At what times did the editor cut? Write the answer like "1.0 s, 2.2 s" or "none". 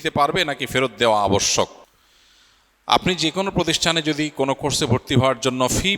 none